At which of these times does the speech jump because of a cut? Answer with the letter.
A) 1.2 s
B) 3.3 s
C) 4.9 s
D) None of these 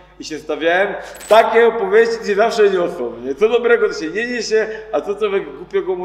A